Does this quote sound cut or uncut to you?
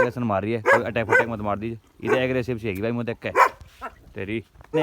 uncut